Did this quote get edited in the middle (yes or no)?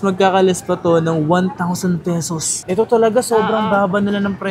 yes